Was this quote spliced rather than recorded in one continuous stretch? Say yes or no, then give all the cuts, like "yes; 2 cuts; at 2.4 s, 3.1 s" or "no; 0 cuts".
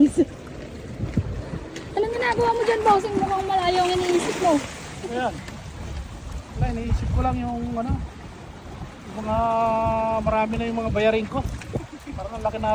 no; 0 cuts